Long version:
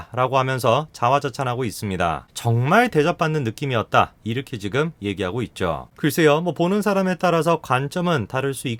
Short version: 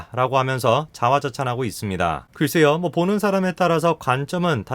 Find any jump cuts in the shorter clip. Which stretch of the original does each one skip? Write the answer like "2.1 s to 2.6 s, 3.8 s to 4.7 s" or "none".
2.3 s to 5.9 s